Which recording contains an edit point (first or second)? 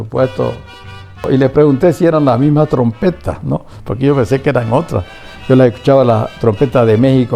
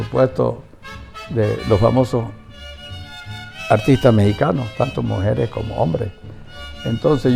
first